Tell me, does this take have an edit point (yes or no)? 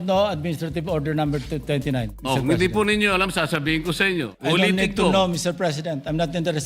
yes